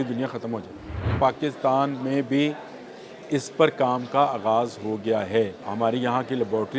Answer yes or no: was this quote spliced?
yes